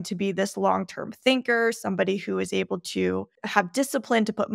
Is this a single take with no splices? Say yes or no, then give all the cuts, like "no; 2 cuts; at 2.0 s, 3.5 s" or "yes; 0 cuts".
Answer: no; 1 cut; at 3.4 s